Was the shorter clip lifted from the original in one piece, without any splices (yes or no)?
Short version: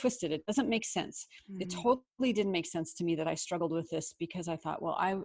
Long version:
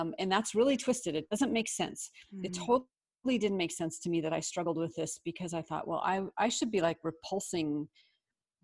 no